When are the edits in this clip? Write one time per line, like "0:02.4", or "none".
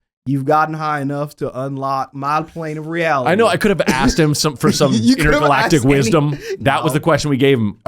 0:06.5